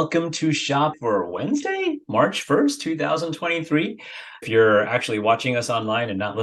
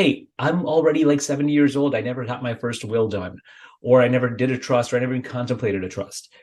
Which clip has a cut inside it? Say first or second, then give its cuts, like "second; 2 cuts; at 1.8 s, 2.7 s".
first; 2 cuts; at 1.0 s, 4.5 s